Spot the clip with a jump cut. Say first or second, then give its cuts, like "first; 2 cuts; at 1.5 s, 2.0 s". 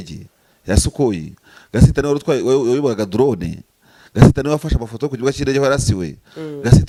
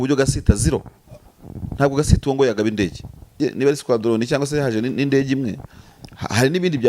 second; 1 cut; at 3.4 s